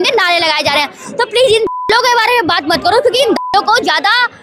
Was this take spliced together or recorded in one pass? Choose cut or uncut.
uncut